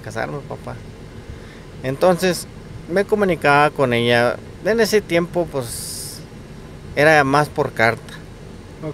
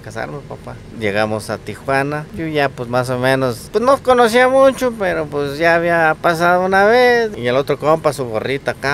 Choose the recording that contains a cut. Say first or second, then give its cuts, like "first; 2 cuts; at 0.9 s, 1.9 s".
second; 4 cuts; at 0.9 s, 2.3 s, 3.6 s, 7.3 s